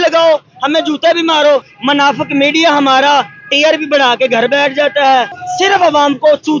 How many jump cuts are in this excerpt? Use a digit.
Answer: 2